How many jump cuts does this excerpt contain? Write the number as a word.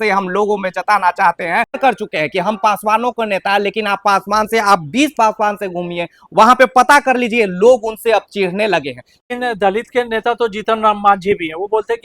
two